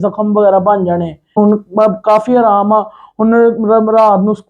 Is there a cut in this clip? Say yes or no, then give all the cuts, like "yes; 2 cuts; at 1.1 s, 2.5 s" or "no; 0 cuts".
yes; 1 cut; at 1.4 s